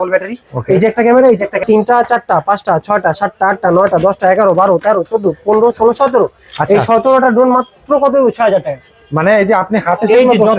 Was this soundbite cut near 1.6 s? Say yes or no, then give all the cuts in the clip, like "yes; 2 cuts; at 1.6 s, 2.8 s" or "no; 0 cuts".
yes; 1 cut; at 1.6 s